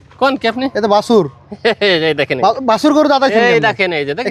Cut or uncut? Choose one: uncut